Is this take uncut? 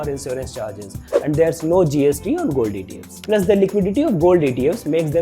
yes; 0 cuts

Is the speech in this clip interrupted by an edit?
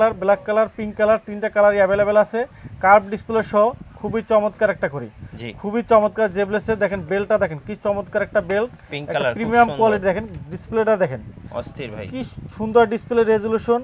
no; 0 cuts

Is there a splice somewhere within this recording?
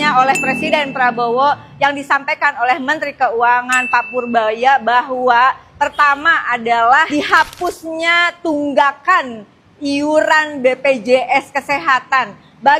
no; 0 cuts

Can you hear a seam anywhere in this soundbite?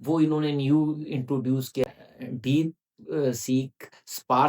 yes; 1 cut; at 1.8 s

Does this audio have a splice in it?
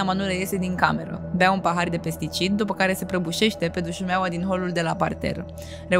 no; 0 cuts

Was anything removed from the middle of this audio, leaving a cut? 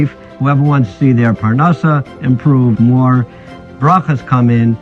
no; 0 cuts

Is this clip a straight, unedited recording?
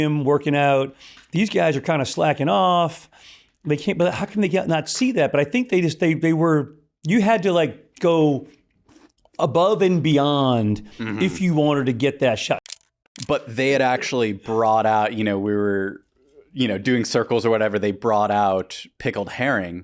no; 1 cut; at 12.6 s

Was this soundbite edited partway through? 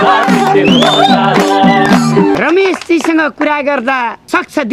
yes; 1 cut; at 2.3 s

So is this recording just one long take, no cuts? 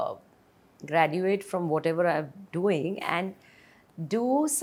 yes; 0 cuts

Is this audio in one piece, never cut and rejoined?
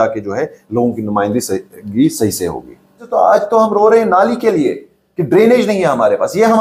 no; 1 cut; at 3.0 s

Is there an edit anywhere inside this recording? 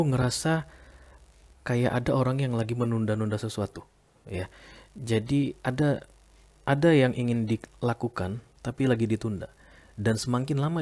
no; 0 cuts

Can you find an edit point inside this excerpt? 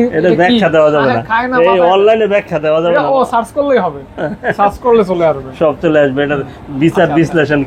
no; 0 cuts

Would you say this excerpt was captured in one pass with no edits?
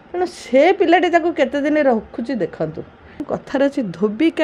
no; 1 cut; at 3.2 s

